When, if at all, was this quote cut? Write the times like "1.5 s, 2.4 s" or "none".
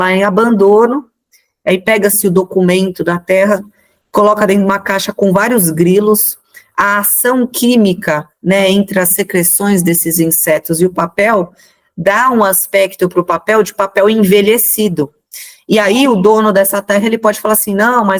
none